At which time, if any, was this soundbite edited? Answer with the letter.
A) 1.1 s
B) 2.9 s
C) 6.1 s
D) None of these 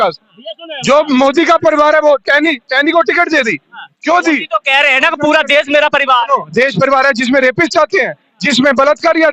D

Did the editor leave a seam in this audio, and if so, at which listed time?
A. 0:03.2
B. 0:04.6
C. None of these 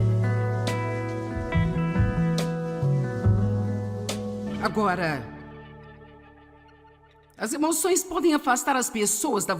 B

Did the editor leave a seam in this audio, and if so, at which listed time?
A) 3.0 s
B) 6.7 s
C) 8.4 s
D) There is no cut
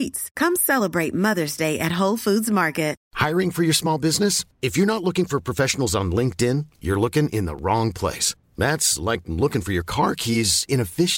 A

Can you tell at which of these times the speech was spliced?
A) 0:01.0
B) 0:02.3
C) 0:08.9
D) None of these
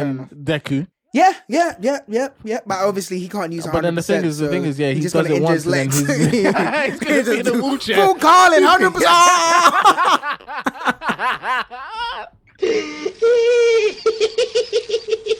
A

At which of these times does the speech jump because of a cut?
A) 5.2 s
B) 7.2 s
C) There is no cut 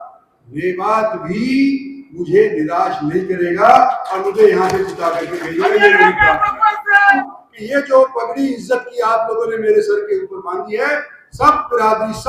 B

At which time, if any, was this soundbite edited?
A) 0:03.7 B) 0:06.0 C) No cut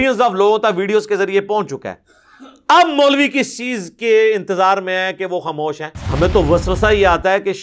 B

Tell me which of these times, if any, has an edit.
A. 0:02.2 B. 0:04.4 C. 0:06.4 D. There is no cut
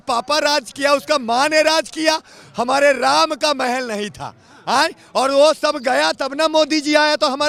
D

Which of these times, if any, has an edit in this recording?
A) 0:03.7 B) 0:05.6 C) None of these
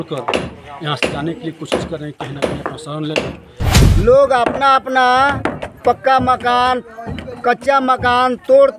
A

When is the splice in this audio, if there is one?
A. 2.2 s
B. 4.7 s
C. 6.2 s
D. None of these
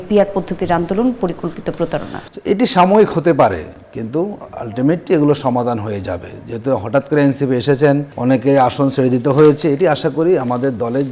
A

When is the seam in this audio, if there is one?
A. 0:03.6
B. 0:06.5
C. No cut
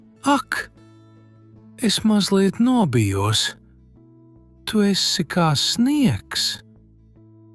B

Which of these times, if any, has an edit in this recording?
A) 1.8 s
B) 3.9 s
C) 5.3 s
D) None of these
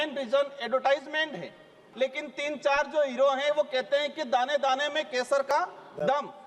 A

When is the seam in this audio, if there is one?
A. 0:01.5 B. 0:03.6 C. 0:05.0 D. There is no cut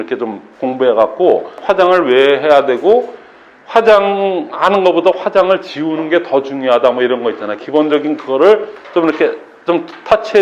A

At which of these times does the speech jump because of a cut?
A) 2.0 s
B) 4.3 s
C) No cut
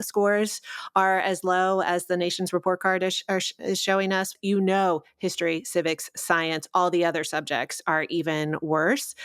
B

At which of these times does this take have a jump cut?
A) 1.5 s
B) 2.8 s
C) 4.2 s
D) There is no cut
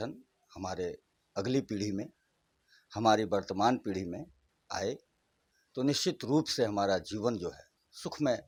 D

